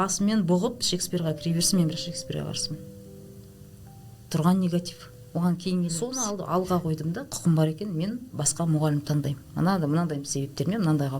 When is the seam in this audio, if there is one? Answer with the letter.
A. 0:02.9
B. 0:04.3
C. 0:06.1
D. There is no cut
C